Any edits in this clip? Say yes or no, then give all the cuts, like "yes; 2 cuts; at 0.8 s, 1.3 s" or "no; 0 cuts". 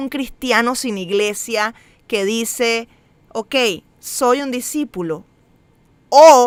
no; 0 cuts